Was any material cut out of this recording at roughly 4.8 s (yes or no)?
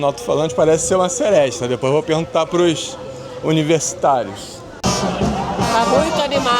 yes